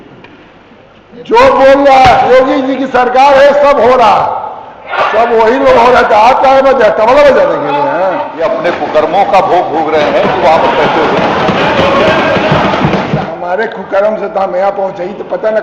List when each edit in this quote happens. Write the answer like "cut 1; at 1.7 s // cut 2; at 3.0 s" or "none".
cut 1; at 8.3 s // cut 2; at 13.2 s